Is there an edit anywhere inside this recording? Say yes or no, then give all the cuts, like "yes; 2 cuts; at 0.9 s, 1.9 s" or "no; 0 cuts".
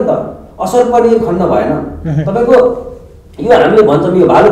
no; 0 cuts